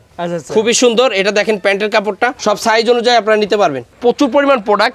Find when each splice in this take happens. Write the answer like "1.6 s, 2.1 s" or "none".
2.4 s, 3.9 s